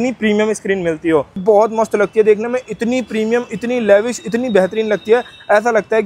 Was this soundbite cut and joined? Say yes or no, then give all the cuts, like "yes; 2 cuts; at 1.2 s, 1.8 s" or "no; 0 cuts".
yes; 1 cut; at 1.4 s